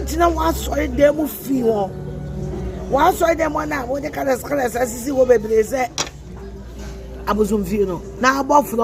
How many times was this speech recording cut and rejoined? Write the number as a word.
zero